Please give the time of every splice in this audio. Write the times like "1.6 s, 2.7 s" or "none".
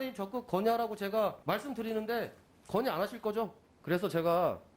1.4 s, 3.6 s